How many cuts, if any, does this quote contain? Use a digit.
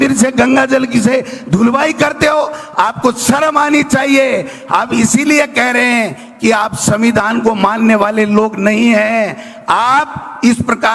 0